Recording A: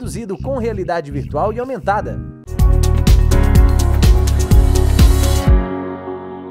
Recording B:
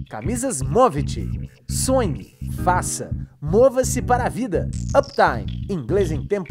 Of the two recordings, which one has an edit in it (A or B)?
A